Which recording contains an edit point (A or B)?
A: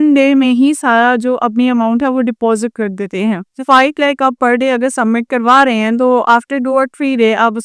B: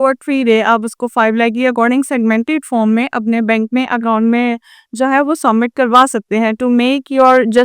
A